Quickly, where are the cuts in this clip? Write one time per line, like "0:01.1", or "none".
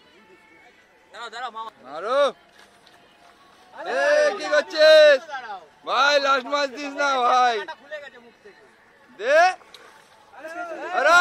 0:01.7